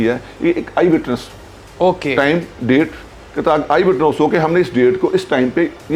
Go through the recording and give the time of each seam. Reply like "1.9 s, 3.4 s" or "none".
none